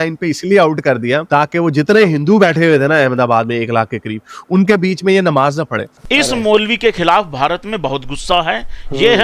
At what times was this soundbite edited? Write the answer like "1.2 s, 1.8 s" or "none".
5.9 s